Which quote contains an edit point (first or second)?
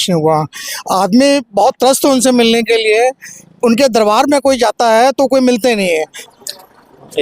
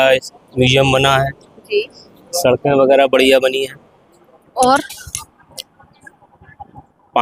first